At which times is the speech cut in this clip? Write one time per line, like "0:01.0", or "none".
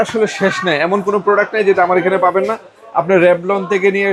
none